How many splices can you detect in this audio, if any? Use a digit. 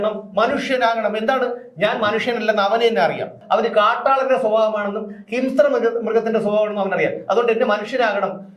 1